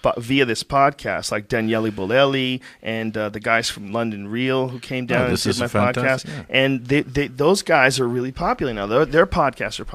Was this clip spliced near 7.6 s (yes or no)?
yes